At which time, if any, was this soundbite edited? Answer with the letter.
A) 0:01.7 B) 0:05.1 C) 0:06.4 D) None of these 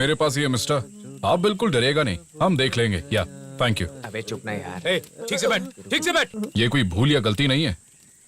C